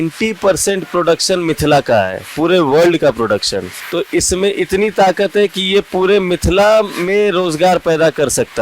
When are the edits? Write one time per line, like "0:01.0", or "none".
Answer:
0:03.8